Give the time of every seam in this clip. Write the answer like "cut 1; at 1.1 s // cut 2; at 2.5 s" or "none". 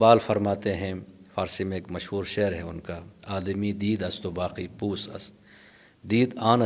none